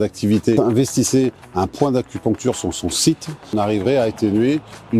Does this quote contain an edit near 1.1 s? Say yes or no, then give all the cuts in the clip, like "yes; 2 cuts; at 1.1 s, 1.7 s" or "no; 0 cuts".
no; 1 cut; at 3.5 s